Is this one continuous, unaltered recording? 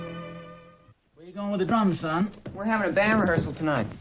no; 1 cut; at 3.1 s

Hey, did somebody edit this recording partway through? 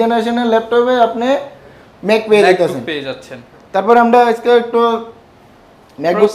no; 0 cuts

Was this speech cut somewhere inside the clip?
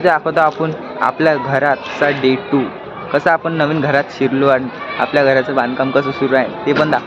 no; 0 cuts

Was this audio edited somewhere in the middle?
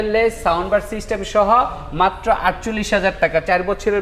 no; 0 cuts

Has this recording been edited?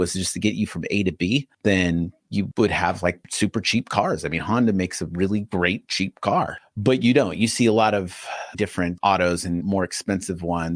yes; 2 cuts; at 6.6 s, 8.5 s

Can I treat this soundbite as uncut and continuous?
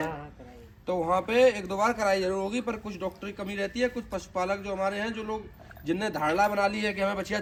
yes; 0 cuts

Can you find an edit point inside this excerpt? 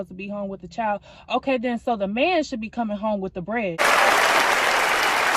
no; 0 cuts

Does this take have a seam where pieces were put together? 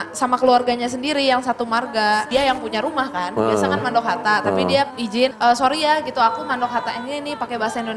yes; 2 cuts; at 2.3 s, 5.1 s

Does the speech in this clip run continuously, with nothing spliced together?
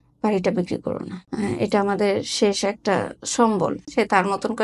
no; 2 cuts; at 1.2 s, 3.9 s

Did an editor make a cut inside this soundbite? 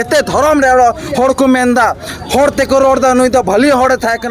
no; 0 cuts

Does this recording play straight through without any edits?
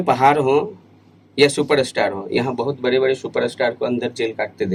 yes; 0 cuts

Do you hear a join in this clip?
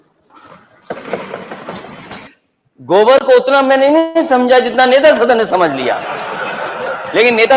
yes; 1 cut; at 2.3 s

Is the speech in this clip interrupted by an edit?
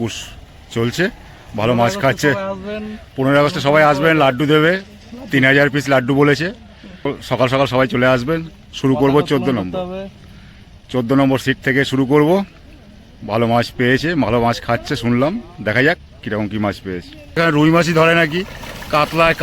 yes; 2 cuts; at 7.0 s, 17.4 s

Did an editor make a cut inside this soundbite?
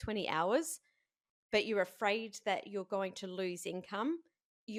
no; 0 cuts

